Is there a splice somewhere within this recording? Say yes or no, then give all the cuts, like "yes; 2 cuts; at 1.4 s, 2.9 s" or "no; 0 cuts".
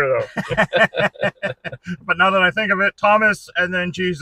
no; 0 cuts